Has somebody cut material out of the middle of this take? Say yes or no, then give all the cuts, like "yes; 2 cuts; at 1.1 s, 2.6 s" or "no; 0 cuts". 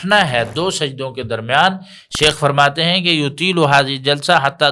no; 0 cuts